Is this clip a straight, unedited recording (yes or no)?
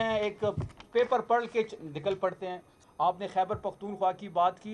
no